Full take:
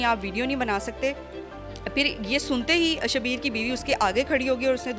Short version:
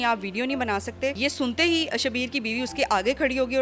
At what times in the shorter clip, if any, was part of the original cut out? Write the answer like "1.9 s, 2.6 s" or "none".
1.2 s

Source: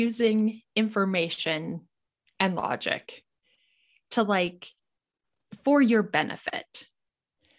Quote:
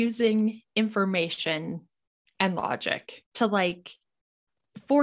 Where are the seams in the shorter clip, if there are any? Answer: 3.2 s

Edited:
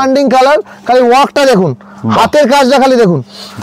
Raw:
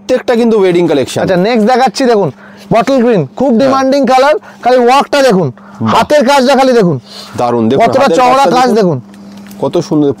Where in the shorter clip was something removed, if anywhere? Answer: none

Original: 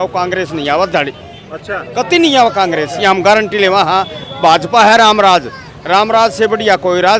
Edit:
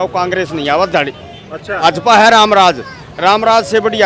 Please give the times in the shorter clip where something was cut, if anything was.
1.8 s

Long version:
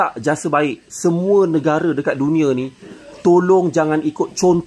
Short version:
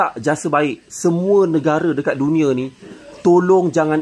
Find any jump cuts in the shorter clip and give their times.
none

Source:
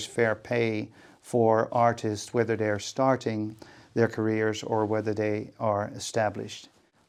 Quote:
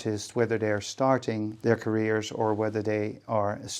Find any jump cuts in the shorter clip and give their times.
1.5 s

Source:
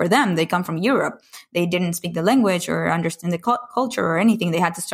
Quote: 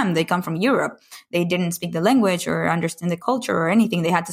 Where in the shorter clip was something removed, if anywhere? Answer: 3.2 s

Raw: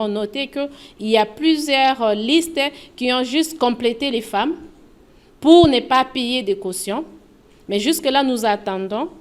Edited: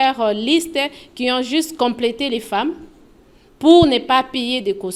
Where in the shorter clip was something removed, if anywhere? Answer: none

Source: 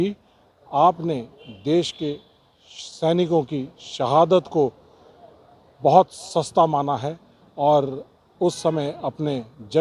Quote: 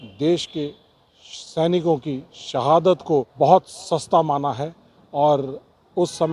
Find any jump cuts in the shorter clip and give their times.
3.3 s

